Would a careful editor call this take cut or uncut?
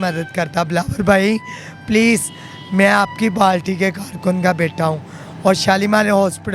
uncut